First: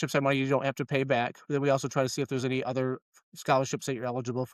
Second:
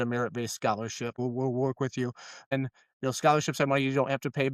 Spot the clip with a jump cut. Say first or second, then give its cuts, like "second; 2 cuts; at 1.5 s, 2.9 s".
second; 2 cuts; at 1.2 s, 2.5 s